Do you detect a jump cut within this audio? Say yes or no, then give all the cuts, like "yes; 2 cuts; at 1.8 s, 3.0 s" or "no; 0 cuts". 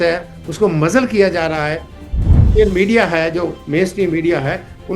yes; 1 cut; at 2.4 s